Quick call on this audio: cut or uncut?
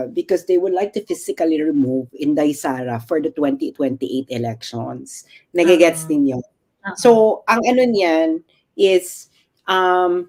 uncut